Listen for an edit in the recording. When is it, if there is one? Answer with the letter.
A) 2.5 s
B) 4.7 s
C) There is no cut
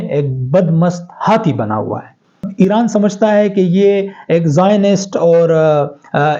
A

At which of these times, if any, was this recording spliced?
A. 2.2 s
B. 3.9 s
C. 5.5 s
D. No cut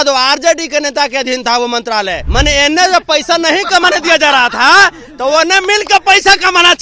A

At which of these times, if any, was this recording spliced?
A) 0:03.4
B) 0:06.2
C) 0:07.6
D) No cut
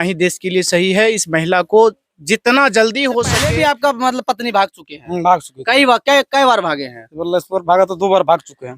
A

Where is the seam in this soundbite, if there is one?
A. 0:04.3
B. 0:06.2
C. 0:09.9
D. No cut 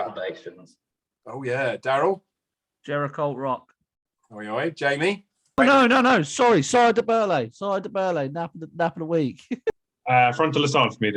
C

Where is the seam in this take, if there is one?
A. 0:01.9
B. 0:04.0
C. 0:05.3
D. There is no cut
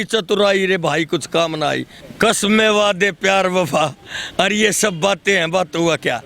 A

